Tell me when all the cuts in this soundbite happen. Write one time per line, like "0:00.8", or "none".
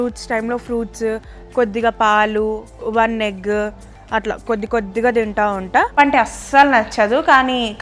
0:05.9